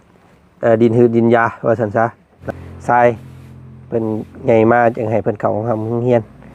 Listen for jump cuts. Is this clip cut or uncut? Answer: cut